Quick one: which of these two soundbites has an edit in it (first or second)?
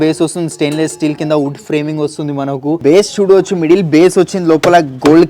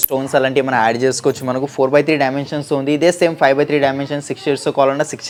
first